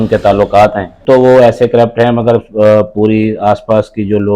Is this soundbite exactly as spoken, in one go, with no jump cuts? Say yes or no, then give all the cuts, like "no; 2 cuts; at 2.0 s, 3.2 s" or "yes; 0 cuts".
no; 1 cut; at 1.0 s